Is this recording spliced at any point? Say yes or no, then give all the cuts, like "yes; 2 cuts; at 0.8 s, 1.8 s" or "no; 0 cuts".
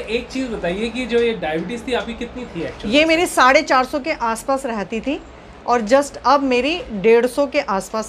no; 0 cuts